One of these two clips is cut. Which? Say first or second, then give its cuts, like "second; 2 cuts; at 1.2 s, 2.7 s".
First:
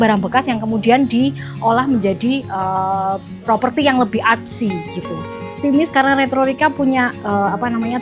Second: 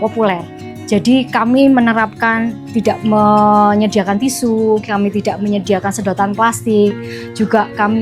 first; 1 cut; at 5.6 s